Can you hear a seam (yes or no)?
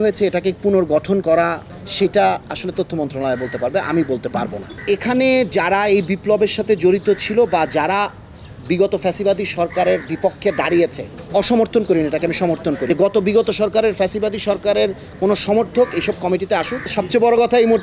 yes